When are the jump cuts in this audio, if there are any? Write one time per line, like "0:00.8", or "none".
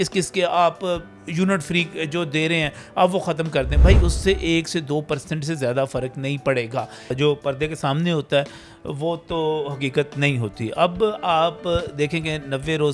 0:07.1